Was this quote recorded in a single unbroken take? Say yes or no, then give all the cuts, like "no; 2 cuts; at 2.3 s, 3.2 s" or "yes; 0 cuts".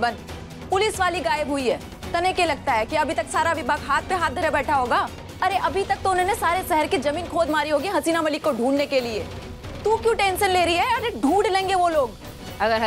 yes; 0 cuts